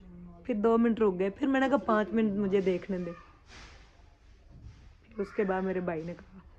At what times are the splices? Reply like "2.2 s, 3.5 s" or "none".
none

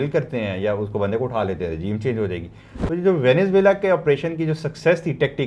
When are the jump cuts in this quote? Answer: none

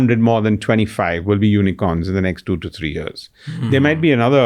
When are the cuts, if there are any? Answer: none

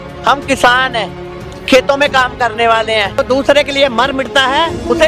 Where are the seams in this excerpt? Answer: 3.2 s

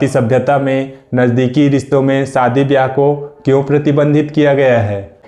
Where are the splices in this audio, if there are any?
none

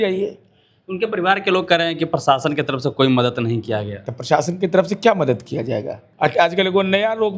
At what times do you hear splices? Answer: 6.0 s

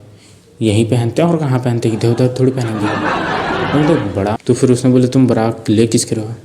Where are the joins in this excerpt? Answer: 4.3 s

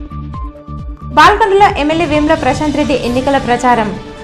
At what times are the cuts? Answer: none

